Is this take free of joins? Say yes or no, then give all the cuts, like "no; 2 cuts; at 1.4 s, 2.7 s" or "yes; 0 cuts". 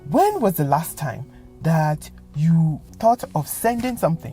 yes; 0 cuts